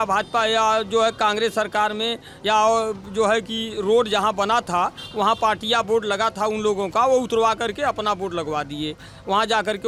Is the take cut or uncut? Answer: uncut